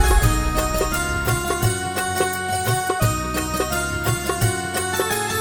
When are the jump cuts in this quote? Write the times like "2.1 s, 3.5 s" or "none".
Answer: 1.6 s